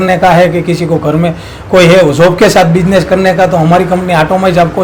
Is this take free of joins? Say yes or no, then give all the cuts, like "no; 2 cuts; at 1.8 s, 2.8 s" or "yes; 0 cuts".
yes; 0 cuts